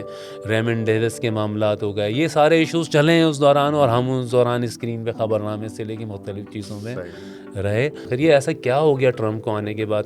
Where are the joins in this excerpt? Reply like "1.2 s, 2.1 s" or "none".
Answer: 8.0 s